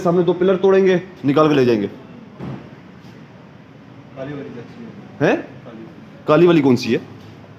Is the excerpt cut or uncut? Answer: cut